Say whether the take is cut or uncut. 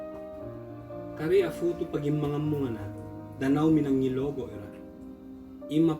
cut